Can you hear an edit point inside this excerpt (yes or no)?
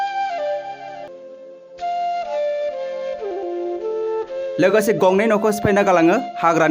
yes